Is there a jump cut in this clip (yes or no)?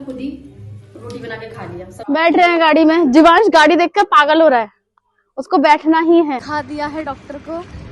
yes